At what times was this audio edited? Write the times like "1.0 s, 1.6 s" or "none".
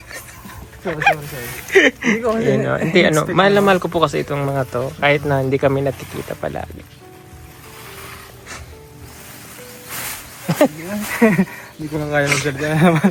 none